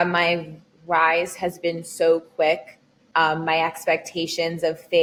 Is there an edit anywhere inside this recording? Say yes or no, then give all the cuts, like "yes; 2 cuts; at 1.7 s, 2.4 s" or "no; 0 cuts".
no; 0 cuts